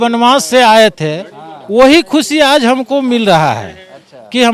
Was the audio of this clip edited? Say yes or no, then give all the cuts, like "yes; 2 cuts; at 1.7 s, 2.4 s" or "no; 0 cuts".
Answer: no; 0 cuts